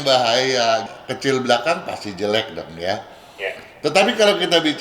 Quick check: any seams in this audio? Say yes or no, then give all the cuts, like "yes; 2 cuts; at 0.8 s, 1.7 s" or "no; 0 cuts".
yes; 1 cut; at 0.9 s